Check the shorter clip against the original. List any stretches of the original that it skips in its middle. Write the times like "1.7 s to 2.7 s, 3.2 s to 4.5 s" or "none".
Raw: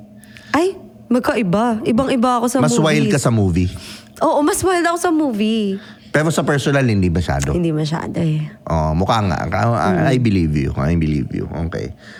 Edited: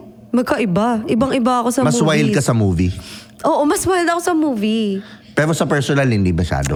none